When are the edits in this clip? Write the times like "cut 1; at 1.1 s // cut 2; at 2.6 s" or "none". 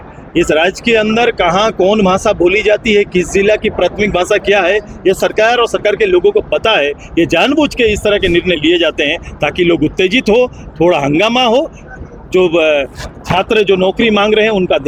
none